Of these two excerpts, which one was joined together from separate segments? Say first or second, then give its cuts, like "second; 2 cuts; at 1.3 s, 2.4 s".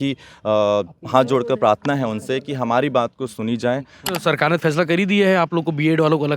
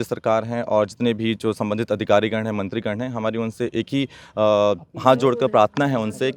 first; 1 cut; at 4.0 s